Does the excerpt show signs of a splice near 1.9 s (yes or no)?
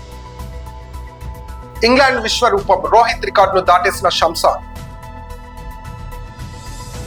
no